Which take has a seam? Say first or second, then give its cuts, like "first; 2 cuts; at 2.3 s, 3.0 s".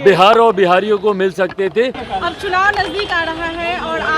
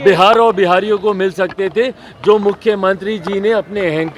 first; 1 cut; at 2.0 s